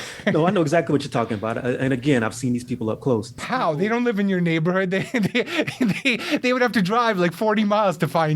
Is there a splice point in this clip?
yes; 1 cut; at 3.4 s

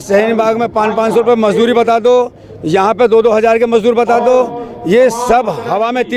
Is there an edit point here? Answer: no; 0 cuts

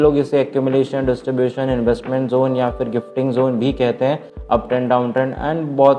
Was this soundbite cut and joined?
no; 0 cuts

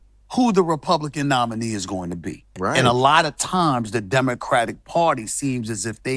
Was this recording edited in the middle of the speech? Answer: yes; 1 cut; at 2.5 s

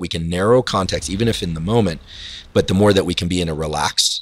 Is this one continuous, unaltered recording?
yes; 0 cuts

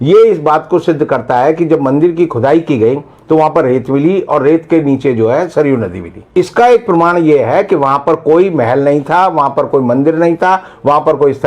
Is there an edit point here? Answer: yes; 1 cut; at 6.3 s

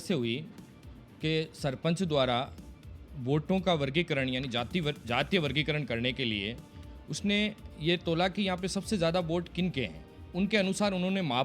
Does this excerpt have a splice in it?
no; 0 cuts

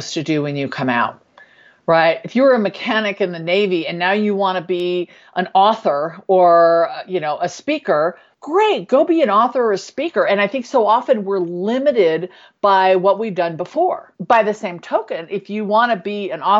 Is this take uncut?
no; 2 cuts; at 8.3 s, 14.1 s

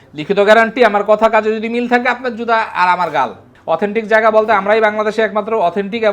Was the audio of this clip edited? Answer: yes; 1 cut; at 3.5 s

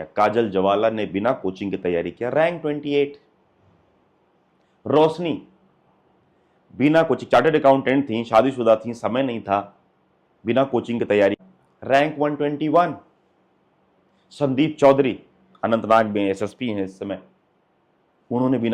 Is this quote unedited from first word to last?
no; 1 cut; at 11.4 s

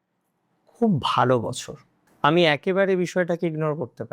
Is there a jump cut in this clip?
yes; 1 cut; at 2.1 s

